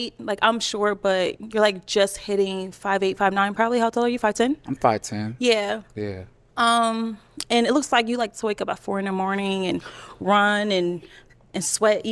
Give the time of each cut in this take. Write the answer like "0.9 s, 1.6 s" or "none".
none